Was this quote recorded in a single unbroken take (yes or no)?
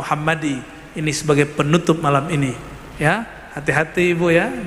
yes